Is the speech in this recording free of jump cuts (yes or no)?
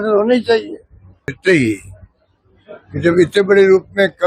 no